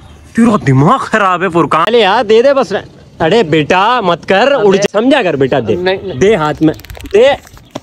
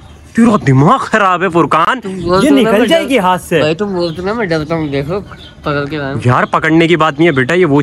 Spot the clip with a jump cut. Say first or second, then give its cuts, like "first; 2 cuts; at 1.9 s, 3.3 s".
first; 2 cuts; at 1.9 s, 4.9 s